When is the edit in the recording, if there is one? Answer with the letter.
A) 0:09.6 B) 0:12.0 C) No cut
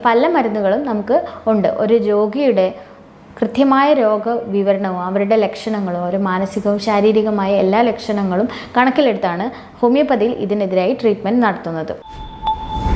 B